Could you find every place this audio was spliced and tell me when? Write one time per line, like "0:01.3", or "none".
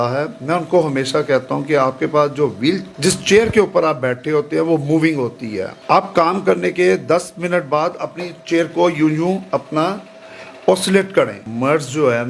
0:02.9
0:05.7
0:11.5